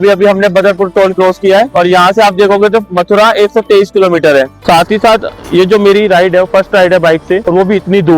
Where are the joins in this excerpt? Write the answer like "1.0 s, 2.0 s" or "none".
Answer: 1.7 s, 4.6 s